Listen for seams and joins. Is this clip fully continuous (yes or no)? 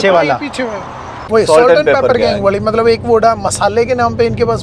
no